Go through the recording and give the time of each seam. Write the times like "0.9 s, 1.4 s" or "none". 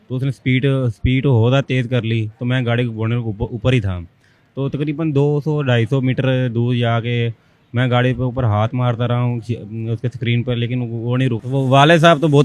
11.4 s